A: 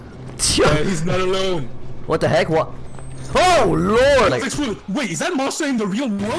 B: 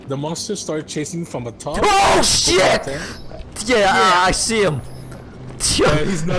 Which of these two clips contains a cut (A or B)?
A